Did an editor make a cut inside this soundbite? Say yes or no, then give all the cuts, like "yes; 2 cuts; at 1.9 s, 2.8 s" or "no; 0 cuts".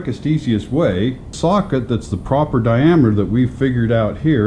yes; 1 cut; at 1.3 s